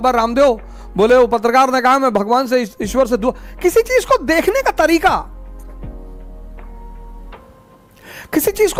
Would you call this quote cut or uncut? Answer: uncut